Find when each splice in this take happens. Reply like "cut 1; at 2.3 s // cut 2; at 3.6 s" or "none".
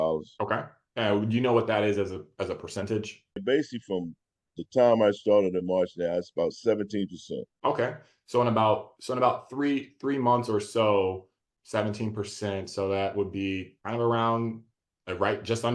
cut 1; at 3.4 s